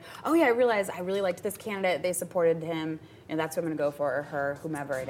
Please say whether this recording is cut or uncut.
uncut